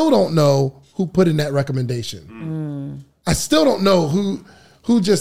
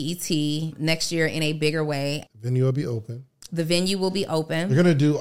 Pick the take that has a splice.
second; 2 cuts; at 0.8 s, 2.2 s

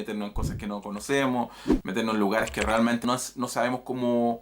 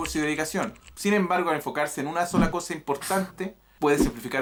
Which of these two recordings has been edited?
first; 1 cut; at 3.0 s

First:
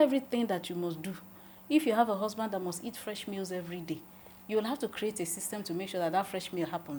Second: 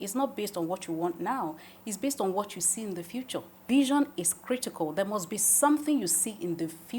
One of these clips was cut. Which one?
second; 1 cut; at 3.5 s

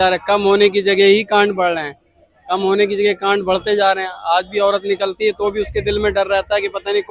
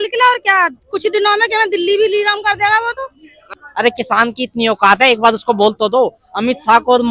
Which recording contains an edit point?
second; 1 cut; at 3.4 s

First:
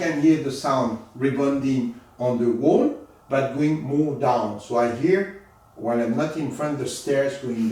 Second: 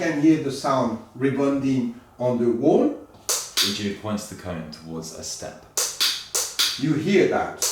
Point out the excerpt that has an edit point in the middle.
second; 1 cut; at 3.1 s

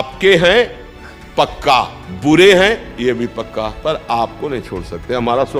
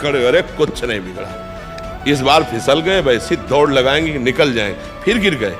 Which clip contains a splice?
first; 2 cuts; at 2.0 s, 3.7 s

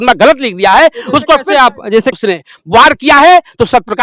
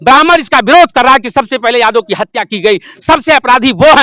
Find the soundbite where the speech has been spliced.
first; 1 cut; at 2.1 s

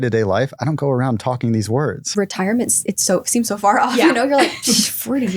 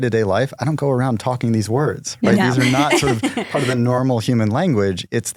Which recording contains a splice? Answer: first; 1 cut; at 2.1 s

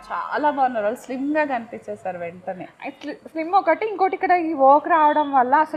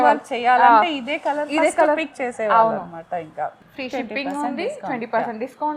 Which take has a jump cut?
second; 1 cut; at 3.6 s

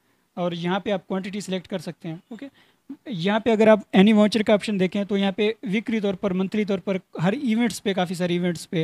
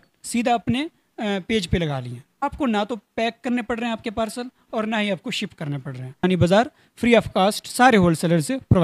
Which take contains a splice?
second; 2 cuts; at 2.3 s, 6.2 s

